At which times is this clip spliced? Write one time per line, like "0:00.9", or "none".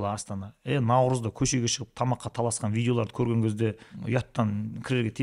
0:03.9